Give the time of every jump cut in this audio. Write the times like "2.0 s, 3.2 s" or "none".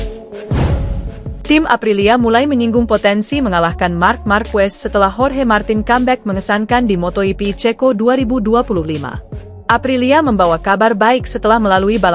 1.0 s